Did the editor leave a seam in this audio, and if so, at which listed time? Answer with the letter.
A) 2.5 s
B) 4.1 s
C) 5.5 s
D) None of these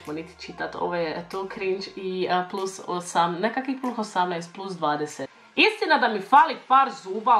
C